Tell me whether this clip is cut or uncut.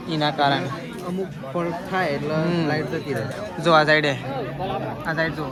uncut